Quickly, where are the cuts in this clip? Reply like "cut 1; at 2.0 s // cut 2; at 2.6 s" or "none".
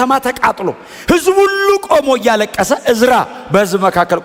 none